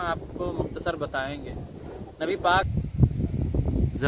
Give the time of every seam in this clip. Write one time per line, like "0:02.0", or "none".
0:02.7